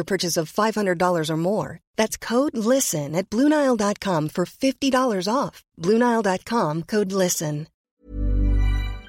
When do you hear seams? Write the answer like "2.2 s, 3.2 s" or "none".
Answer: 7.9 s